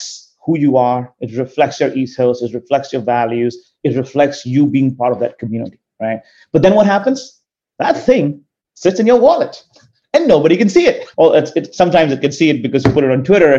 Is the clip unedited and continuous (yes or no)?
no